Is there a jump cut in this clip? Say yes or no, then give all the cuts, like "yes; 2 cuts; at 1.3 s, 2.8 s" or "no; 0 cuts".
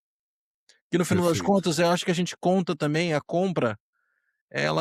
no; 0 cuts